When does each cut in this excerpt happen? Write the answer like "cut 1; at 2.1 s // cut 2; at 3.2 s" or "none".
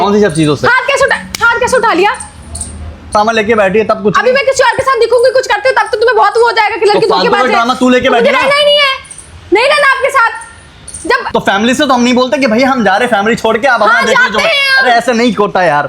cut 1; at 3.1 s // cut 2; at 11.2 s